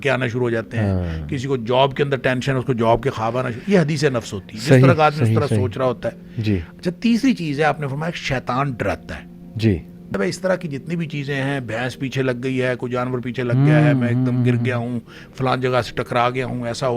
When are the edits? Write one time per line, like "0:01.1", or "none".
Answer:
0:10.1